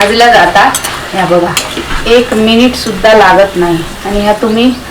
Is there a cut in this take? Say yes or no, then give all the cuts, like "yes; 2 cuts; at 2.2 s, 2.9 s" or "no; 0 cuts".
yes; 2 cuts; at 1.8 s, 3.9 s